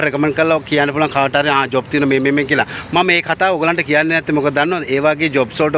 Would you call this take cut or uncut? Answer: uncut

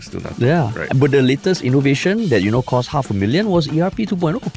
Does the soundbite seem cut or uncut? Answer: uncut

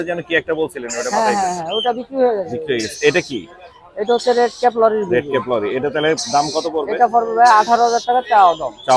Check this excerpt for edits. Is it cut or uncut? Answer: uncut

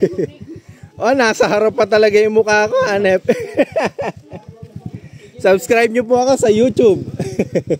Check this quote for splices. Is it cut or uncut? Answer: uncut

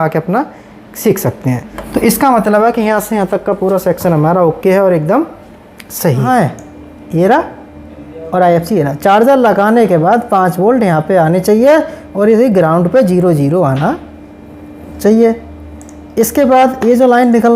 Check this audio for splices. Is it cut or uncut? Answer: cut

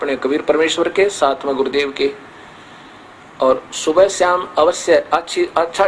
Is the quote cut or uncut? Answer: uncut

